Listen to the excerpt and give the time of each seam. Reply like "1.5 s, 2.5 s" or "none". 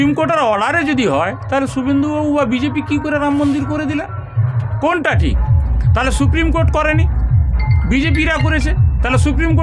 none